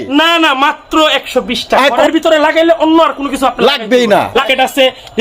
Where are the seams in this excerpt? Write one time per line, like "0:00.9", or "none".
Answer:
0:02.0
0:04.4